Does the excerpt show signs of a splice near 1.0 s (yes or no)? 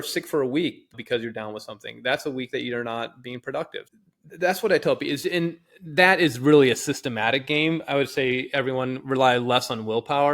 yes